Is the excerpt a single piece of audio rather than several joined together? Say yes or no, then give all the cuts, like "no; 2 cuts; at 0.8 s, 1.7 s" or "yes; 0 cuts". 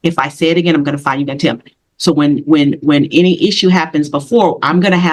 yes; 0 cuts